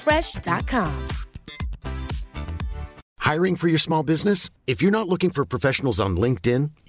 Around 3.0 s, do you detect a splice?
yes; 1 cut; at 3.0 s

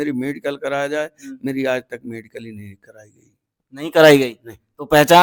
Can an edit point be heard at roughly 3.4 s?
no; 0 cuts

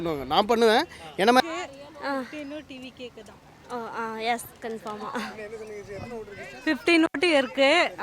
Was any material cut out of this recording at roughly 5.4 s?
no; 1 cut; at 1.4 s

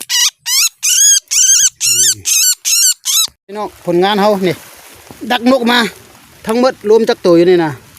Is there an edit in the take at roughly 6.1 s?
no; 1 cut; at 3.4 s

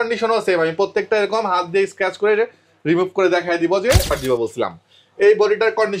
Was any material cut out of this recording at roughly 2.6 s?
no; 1 cut; at 4.1 s

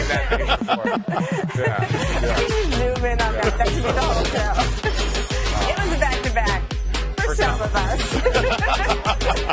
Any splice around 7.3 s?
yes; 1 cut; at 7.3 s

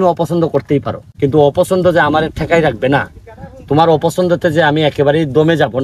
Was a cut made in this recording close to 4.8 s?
no; 1 cut; at 1.0 s

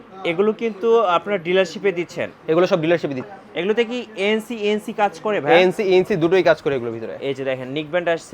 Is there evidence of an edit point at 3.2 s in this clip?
yes; 1 cut; at 3.2 s

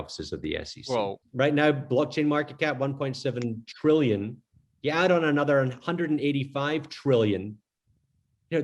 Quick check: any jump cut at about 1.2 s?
yes; 1 cut; at 1.2 s

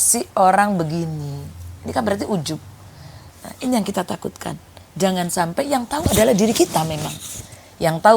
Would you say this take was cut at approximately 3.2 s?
yes; 1 cut; at 3.2 s

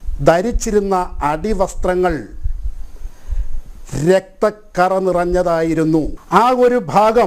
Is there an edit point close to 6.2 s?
yes; 1 cut; at 6.2 s

